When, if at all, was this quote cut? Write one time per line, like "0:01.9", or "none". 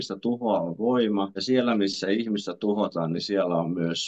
0:01.4